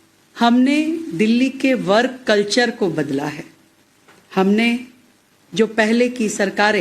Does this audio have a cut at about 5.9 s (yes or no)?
yes